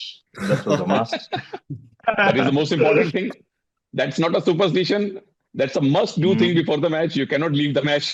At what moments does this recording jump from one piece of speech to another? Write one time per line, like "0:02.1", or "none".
none